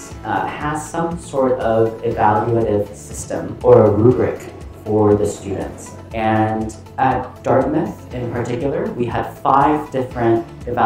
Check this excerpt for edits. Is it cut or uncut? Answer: uncut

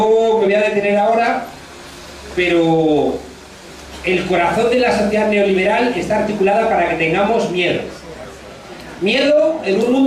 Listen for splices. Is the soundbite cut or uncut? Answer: cut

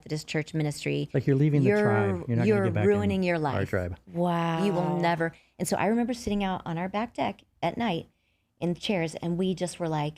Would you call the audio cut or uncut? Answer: uncut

